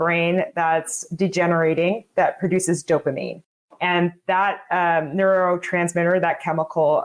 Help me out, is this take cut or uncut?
uncut